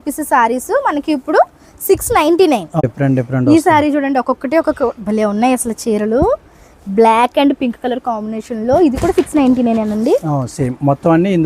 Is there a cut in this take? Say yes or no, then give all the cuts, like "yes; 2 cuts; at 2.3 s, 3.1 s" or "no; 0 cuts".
no; 0 cuts